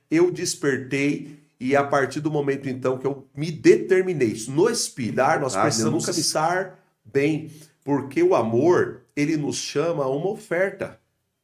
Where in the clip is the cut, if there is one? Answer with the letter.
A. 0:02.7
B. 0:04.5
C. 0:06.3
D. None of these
C